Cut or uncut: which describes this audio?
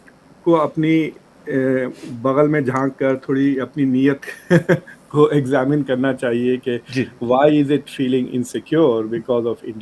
uncut